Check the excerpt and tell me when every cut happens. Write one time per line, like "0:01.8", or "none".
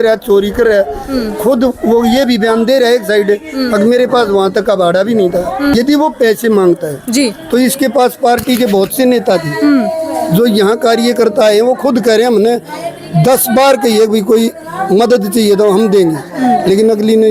0:05.7